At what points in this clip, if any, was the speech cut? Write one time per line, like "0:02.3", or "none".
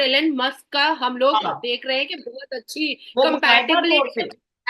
none